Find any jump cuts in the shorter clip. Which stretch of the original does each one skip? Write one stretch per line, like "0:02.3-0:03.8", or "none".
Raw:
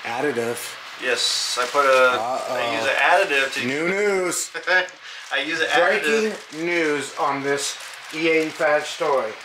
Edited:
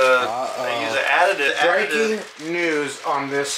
0:03.4-0:05.6